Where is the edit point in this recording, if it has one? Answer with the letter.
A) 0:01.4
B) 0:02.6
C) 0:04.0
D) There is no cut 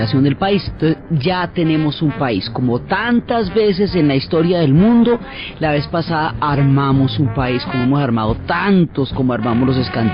C